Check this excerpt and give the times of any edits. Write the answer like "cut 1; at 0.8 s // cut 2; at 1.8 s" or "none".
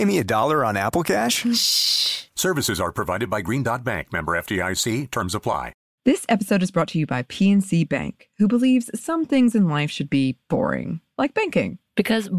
cut 1; at 5.8 s